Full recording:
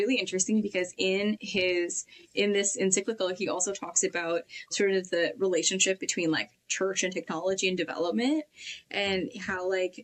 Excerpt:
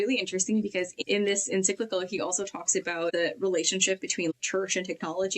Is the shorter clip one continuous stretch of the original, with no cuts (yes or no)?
no